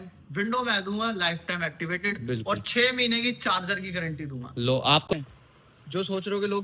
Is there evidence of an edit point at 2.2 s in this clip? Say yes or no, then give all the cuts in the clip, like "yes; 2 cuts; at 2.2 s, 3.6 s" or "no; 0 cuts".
no; 1 cut; at 5.0 s